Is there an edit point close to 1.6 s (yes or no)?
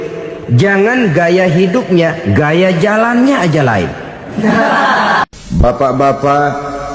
no